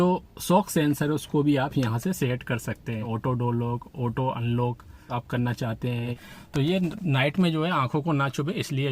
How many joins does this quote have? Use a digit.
2